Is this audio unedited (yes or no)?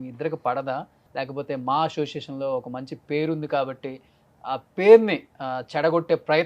no